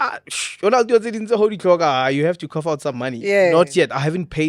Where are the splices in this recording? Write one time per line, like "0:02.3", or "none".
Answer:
none